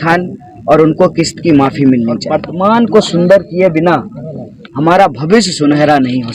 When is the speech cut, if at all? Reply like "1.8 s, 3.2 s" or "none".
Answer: 2.4 s